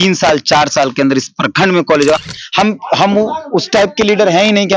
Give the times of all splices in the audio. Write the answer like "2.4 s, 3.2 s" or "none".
2.2 s